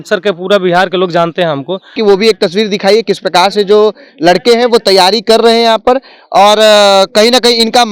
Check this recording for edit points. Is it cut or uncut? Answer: cut